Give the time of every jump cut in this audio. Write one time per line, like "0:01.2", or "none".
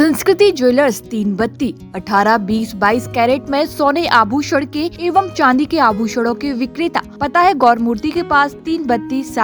0:04.9
0:07.1